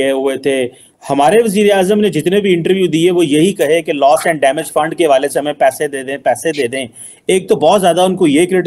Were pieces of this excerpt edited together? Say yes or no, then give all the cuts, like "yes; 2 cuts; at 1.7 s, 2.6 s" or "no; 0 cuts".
no; 0 cuts